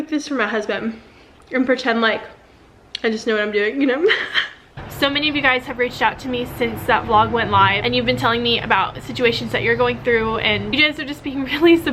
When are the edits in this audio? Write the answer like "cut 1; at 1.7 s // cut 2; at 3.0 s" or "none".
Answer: cut 1; at 4.7 s // cut 2; at 10.7 s